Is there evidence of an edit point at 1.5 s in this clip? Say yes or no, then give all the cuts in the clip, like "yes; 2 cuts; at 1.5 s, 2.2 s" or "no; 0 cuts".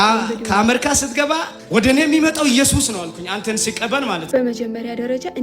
yes; 2 cuts; at 1.5 s, 4.3 s